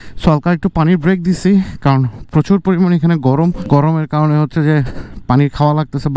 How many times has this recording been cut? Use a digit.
1